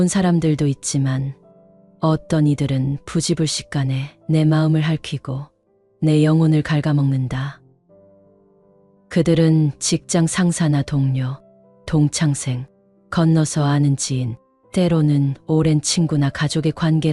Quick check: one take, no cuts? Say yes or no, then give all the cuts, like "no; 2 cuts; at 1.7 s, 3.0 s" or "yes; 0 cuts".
yes; 0 cuts